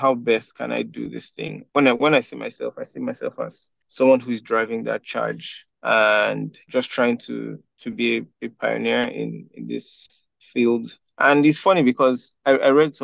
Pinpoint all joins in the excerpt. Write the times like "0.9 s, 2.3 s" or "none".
none